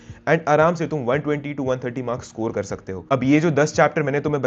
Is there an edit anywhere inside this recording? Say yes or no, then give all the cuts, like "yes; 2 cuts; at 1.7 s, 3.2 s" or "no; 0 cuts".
yes; 1 cut; at 3.0 s